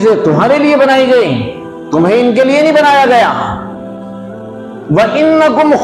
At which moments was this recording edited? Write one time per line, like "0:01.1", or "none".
none

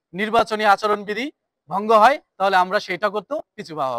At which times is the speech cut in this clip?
none

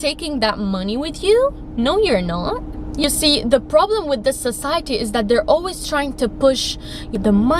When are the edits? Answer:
0:02.9

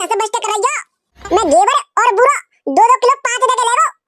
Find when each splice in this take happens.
0:01.1

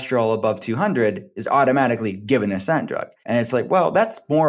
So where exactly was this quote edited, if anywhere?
0:03.1

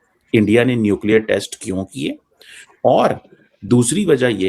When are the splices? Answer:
none

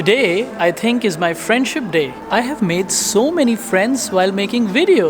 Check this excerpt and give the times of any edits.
0:02.2

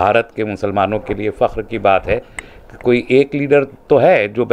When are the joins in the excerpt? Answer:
none

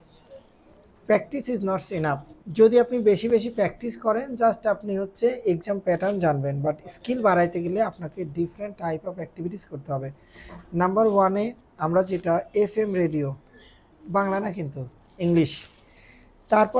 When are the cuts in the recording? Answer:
0:02.4

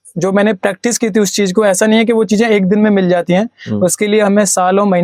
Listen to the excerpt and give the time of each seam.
none

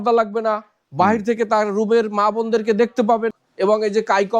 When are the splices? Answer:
0:03.3

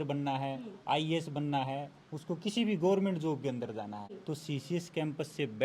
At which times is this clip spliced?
0:04.1

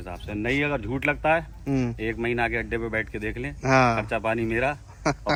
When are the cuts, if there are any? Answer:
none

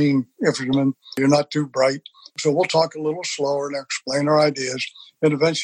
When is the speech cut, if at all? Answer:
0:01.2
0:02.3

